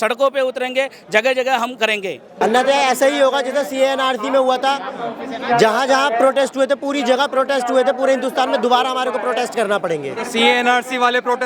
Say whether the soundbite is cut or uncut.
cut